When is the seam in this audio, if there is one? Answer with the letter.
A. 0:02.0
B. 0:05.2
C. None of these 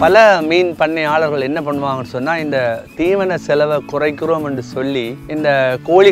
B